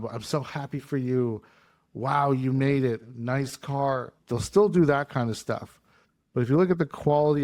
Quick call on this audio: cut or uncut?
uncut